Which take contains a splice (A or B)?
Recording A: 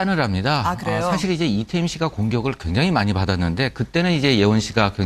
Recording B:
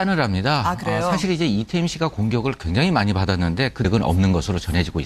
A